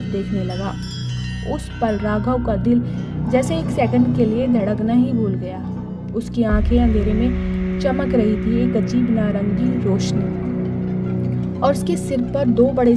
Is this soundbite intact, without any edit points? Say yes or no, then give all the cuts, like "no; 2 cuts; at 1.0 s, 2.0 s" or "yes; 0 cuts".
yes; 0 cuts